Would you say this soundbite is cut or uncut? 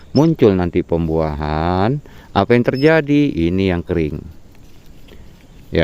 uncut